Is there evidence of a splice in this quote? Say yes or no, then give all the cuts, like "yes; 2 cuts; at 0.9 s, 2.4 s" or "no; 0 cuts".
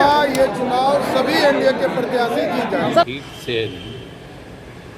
yes; 1 cut; at 3.1 s